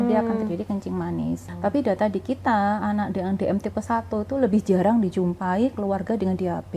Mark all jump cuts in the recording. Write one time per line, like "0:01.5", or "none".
0:01.5